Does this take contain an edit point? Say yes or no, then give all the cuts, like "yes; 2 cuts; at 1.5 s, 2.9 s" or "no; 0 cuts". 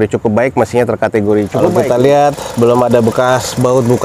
yes; 1 cut; at 1.7 s